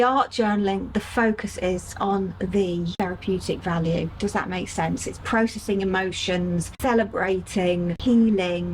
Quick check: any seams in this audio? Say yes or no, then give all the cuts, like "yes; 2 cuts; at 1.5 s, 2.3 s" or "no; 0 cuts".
yes; 1 cut; at 2.9 s